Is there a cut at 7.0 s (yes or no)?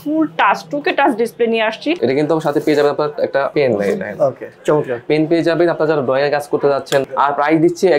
yes